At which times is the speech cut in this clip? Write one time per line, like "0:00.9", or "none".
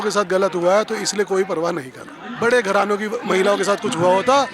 0:02.2

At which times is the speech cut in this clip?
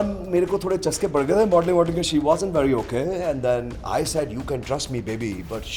none

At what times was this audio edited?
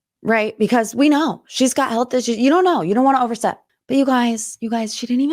0:03.7

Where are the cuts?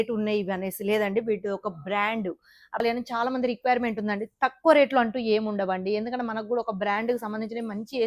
0:02.8

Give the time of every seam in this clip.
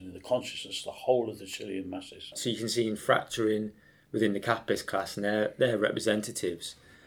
0:02.4

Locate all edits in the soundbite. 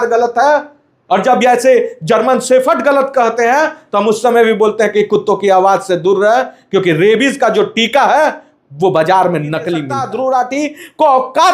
0:10.0

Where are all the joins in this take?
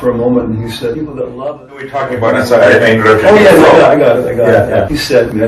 0:02.0

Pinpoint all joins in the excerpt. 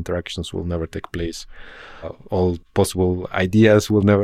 0:02.6

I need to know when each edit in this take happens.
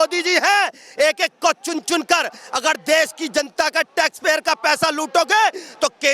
none

